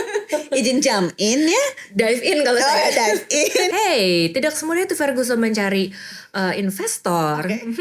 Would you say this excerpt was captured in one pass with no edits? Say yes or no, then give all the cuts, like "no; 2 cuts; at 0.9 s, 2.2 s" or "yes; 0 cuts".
no; 1 cut; at 3.7 s